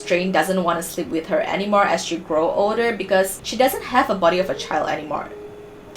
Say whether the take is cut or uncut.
cut